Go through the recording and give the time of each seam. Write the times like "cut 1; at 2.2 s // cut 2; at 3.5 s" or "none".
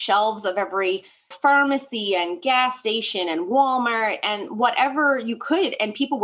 none

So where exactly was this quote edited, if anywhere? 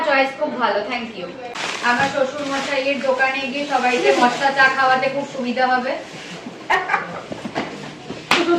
cut 1; at 1.4 s

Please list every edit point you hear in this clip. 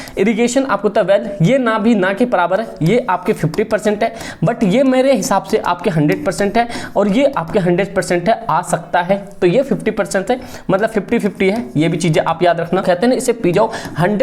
cut 1; at 12.8 s

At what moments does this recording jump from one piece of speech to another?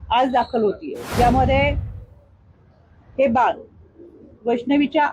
cut 1; at 0.9 s

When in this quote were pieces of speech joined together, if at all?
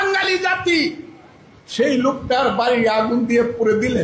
cut 1; at 1.4 s

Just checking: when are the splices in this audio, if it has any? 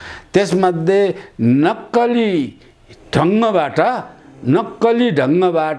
none

